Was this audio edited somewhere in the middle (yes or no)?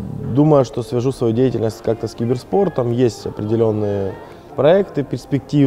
no